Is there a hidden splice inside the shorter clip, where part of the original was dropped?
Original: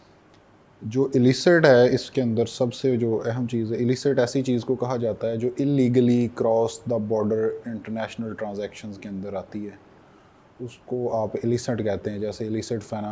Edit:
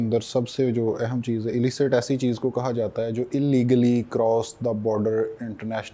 no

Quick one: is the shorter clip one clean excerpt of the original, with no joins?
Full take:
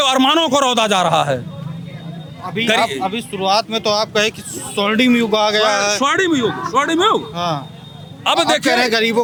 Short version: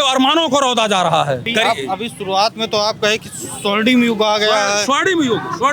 no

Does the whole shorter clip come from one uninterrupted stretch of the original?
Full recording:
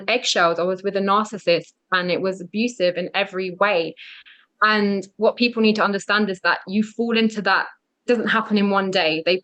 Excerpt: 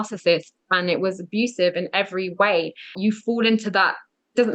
no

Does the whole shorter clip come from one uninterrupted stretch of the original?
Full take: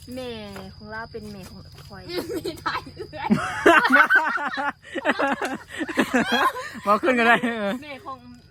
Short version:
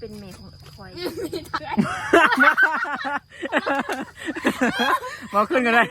no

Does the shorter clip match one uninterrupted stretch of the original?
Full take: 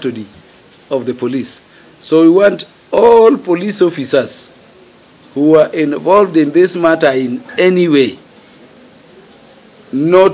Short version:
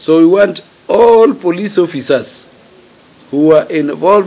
yes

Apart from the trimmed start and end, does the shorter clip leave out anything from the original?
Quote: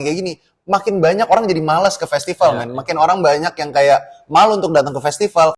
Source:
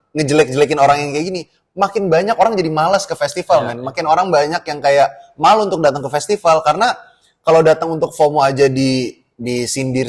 no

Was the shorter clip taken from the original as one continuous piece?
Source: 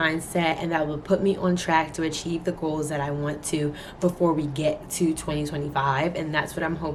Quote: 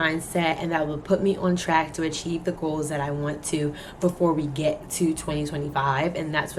yes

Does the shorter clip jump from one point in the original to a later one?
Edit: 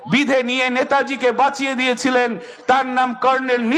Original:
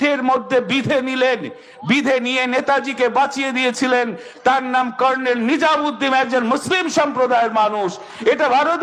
no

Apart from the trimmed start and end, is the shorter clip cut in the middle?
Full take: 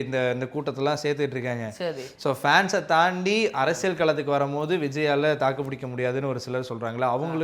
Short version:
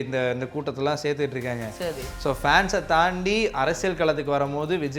no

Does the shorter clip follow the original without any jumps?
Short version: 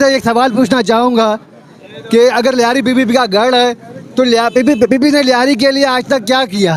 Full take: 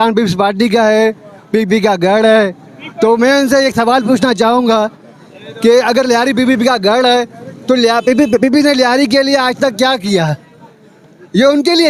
yes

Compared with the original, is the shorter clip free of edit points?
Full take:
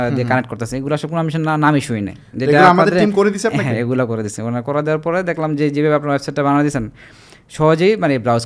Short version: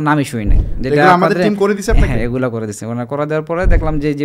yes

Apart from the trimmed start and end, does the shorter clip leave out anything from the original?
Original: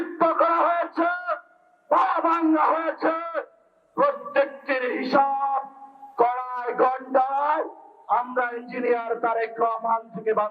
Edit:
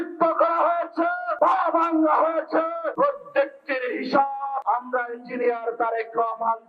yes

